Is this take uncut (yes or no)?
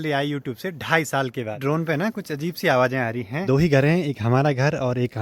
no